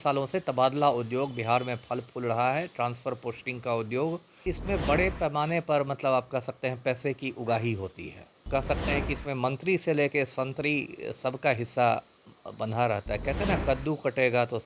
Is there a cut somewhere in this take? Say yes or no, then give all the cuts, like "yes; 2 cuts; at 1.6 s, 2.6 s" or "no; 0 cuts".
yes; 2 cuts; at 4.5 s, 8.4 s